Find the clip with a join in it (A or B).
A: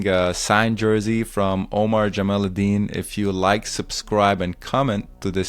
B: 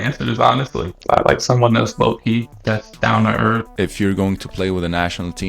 B